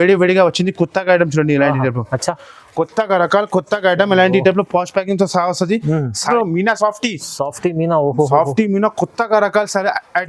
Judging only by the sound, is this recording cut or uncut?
cut